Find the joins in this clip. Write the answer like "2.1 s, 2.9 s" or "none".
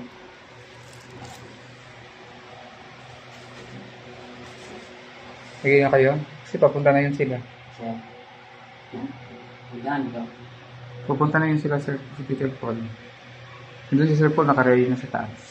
none